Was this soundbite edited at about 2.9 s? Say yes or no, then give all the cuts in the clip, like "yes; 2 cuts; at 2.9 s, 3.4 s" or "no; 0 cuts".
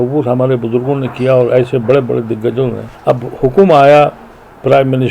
yes; 1 cut; at 2.9 s